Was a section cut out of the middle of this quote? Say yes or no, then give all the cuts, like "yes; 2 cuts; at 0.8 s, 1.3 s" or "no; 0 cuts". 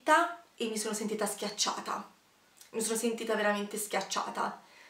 no; 0 cuts